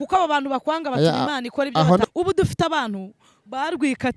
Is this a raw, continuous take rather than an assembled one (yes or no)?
no